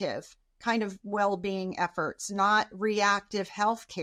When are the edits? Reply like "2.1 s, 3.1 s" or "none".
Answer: none